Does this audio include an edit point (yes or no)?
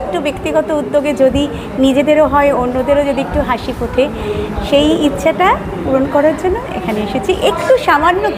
no